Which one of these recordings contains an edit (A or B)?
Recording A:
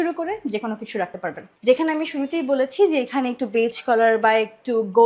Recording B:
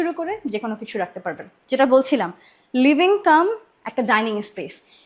A